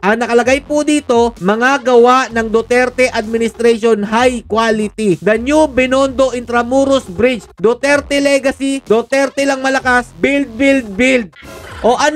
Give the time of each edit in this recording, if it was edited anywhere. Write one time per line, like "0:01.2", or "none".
none